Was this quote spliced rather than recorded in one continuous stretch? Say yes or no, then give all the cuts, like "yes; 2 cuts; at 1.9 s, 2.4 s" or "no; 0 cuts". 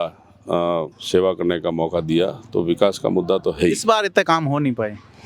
no; 0 cuts